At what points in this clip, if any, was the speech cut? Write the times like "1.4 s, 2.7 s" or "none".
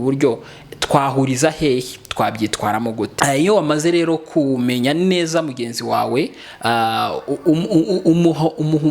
3.1 s